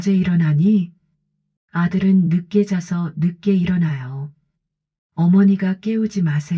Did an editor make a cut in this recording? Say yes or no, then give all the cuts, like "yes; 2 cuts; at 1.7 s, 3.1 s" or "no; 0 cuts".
no; 0 cuts